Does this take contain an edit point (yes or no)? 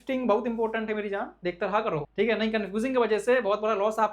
yes